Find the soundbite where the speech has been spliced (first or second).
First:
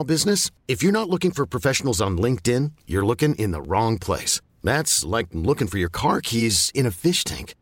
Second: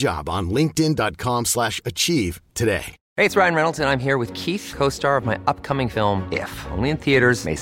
second